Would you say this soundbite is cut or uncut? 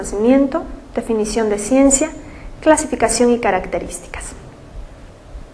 cut